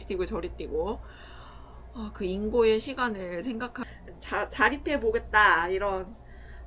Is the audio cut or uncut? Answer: cut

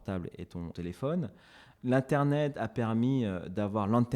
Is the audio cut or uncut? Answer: cut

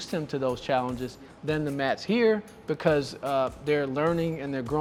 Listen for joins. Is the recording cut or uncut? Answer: uncut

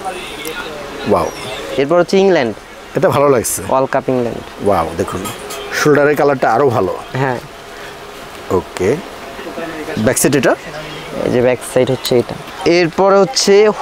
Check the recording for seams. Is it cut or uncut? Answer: cut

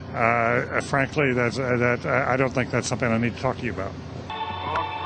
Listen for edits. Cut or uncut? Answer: uncut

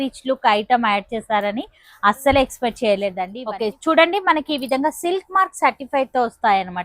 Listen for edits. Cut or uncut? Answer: cut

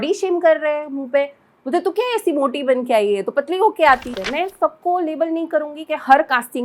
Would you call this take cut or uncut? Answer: cut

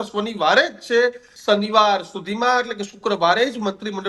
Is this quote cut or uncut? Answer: cut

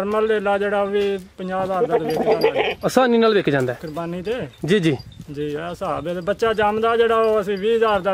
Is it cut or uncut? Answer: uncut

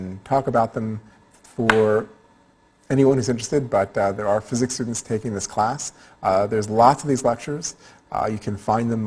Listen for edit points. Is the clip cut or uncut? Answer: uncut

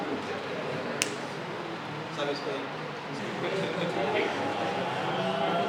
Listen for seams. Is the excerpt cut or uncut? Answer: cut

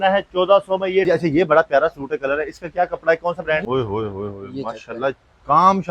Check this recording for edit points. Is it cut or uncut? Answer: cut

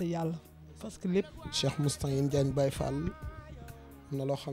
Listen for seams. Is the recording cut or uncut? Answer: cut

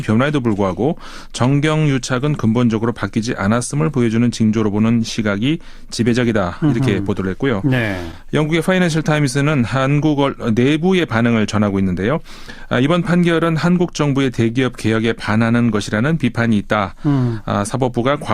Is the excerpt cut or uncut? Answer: cut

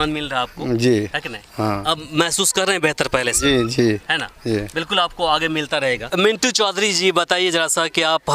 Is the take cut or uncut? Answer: cut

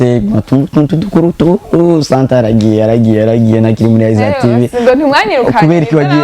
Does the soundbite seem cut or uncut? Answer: uncut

